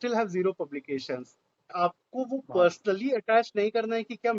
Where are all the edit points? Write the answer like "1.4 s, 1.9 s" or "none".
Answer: 1.7 s